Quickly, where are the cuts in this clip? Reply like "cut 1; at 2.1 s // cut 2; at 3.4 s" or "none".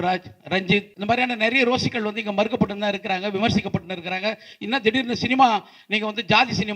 cut 1; at 0.9 s